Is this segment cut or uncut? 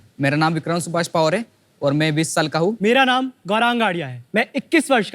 cut